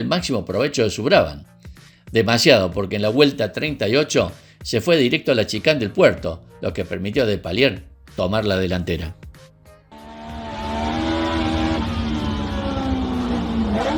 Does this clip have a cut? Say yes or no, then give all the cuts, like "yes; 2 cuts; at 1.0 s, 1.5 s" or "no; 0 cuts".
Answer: no; 0 cuts